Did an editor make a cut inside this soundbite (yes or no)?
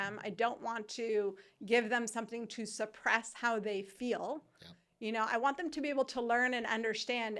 no